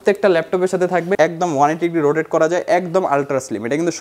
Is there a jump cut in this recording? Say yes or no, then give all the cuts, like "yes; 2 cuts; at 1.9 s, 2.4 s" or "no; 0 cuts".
yes; 1 cut; at 1.1 s